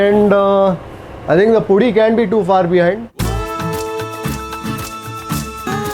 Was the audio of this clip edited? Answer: yes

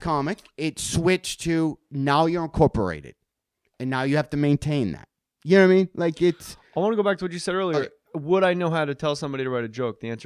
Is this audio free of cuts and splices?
no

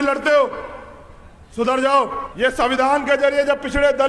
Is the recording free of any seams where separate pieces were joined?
no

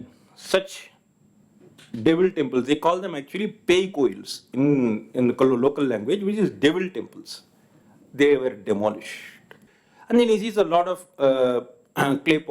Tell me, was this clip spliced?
yes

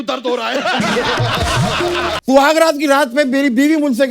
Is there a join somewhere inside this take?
yes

